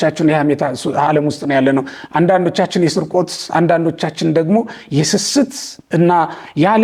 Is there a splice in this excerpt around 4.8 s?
no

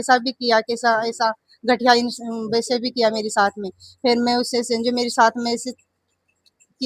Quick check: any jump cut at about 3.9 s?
no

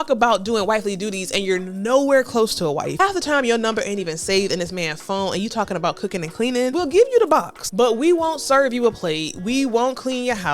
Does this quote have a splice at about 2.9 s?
yes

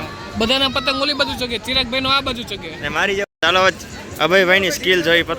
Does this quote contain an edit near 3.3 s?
yes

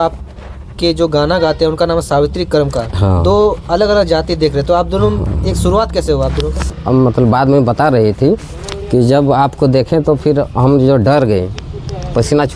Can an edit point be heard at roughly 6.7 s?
yes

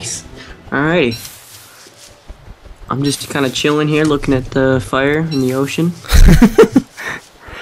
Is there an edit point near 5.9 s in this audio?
no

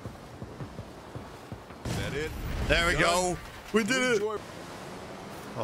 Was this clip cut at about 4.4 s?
yes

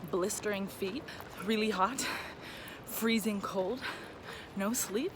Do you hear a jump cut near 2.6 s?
no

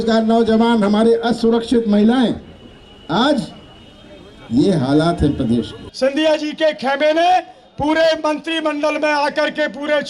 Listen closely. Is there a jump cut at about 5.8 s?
yes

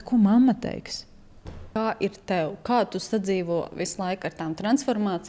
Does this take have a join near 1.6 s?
yes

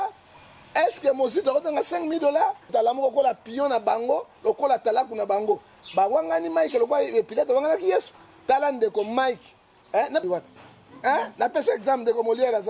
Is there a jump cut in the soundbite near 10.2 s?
yes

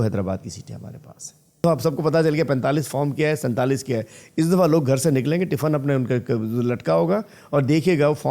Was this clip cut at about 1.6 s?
yes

